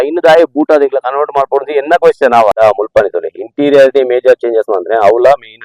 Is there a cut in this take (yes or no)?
yes